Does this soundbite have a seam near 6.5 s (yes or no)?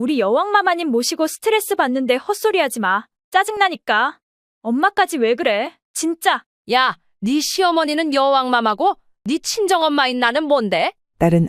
yes